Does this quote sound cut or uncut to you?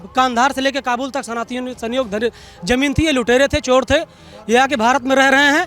uncut